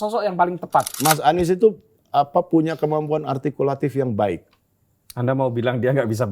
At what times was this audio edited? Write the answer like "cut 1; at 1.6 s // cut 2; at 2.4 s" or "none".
cut 1; at 0.9 s